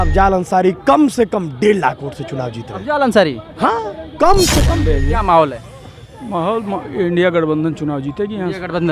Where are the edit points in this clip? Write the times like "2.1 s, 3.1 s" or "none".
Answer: 4.7 s